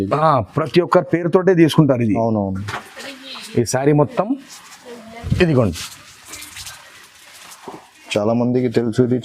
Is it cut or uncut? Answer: uncut